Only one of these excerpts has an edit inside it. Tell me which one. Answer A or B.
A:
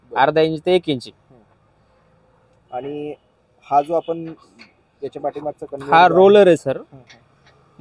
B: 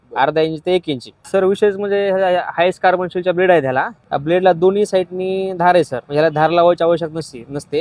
B